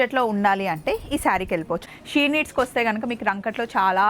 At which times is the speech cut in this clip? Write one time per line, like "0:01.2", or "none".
0:01.9